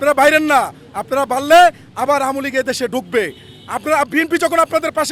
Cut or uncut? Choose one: uncut